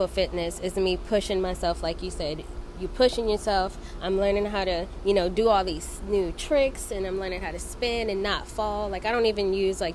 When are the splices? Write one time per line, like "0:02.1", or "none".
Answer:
none

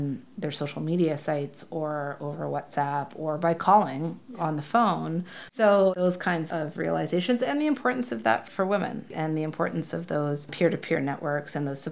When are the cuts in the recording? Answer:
0:05.4

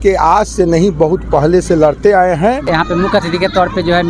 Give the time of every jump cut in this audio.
0:02.7

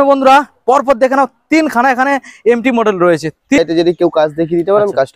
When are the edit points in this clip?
0:03.6

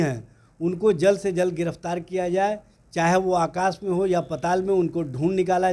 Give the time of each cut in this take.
none

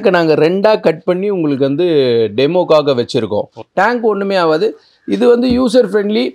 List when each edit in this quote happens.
0:03.6

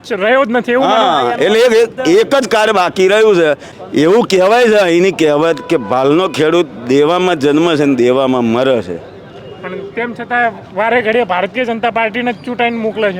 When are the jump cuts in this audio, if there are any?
0:03.7

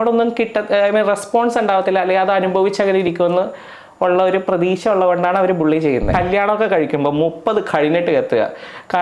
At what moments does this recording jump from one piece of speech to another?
0:06.1

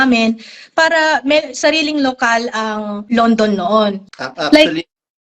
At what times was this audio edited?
0:03.1
0:04.0

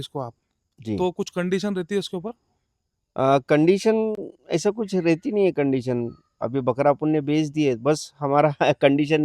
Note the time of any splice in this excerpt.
none

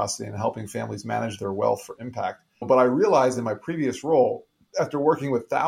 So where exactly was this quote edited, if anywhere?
0:02.5

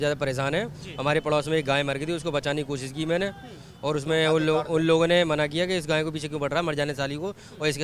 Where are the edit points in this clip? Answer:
none

